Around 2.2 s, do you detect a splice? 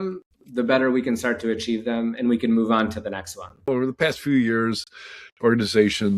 no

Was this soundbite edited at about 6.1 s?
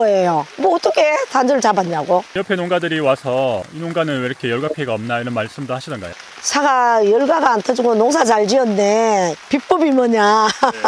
yes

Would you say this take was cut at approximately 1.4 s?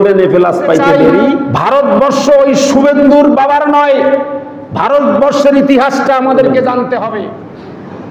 yes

